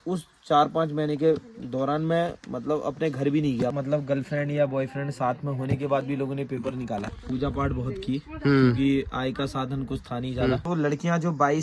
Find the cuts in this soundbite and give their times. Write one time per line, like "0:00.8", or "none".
0:03.7
0:07.0
0:10.6